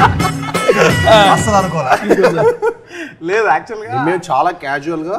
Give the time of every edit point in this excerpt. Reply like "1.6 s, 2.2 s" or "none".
none